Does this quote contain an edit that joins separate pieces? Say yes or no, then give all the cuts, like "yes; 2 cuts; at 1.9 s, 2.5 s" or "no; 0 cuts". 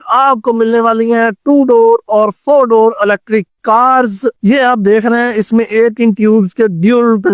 yes; 1 cut; at 4.4 s